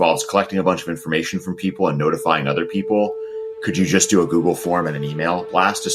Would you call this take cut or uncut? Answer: uncut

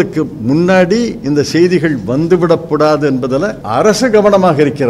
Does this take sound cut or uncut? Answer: cut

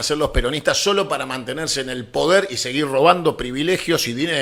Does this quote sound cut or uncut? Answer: uncut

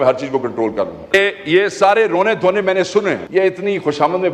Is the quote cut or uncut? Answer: cut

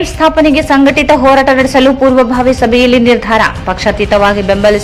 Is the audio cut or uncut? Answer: uncut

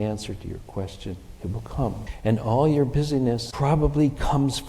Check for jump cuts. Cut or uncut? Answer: cut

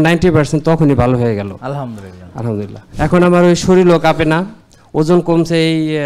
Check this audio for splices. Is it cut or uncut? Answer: cut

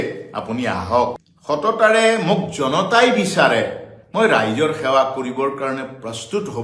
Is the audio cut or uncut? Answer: cut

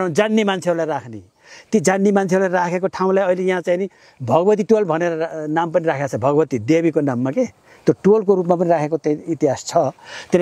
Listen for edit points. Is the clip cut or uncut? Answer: uncut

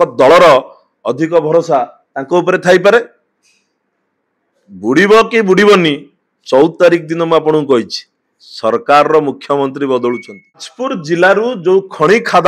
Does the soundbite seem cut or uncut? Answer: cut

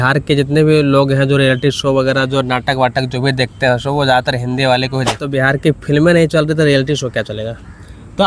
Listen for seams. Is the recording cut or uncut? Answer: cut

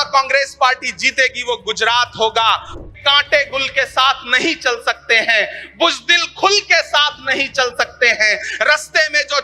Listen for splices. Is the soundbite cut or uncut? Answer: cut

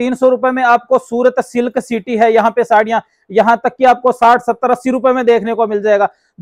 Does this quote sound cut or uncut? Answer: uncut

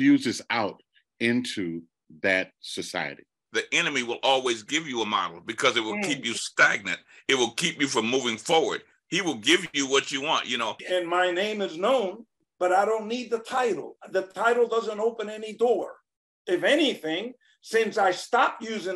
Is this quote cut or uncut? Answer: cut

